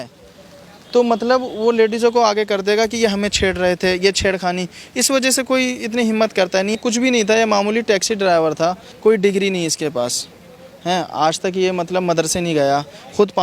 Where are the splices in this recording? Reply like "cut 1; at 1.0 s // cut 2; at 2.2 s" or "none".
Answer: cut 1; at 6.8 s // cut 2; at 8.9 s